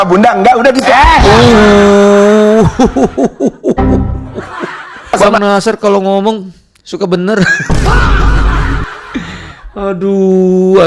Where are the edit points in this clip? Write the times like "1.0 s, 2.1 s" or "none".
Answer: none